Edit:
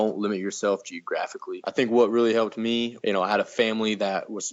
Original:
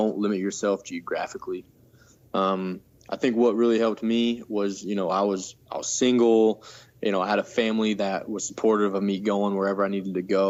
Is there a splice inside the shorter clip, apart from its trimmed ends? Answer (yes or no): yes